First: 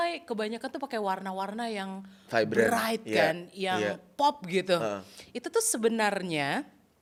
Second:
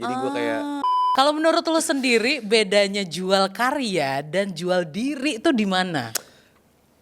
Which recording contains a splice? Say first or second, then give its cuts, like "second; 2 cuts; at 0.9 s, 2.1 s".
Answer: second; 1 cut; at 1.1 s